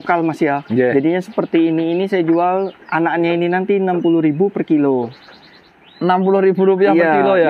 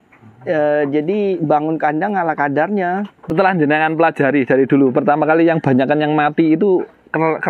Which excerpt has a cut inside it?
second; 1 cut; at 3.2 s

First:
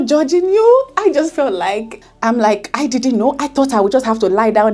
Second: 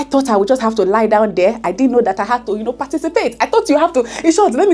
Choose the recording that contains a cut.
first; 1 cut; at 1.9 s

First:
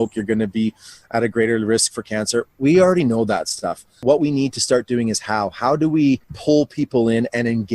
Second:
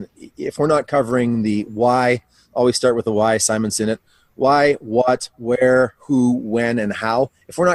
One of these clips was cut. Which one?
first; 2 cuts; at 4.0 s, 6.3 s

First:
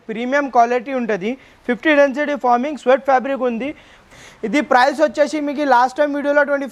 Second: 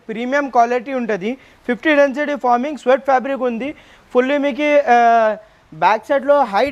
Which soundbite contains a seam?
first; 1 cut; at 4.0 s

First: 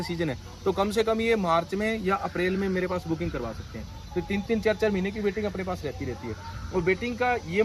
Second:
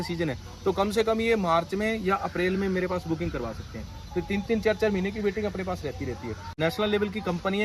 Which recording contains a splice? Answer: second; 1 cut; at 6.6 s

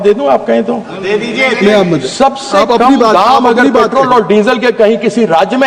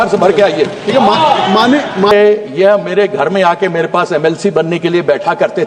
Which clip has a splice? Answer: second; 1 cut; at 2.1 s

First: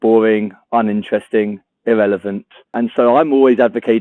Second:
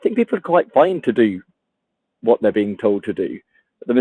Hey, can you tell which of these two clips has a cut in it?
first; 1 cut; at 2.7 s

